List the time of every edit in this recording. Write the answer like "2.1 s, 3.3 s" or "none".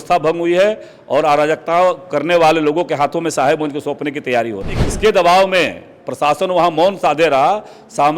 4.8 s